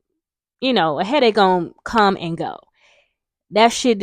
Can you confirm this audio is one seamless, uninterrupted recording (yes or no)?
yes